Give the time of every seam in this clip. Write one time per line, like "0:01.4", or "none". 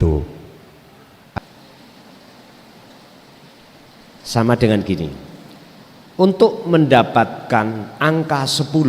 0:01.4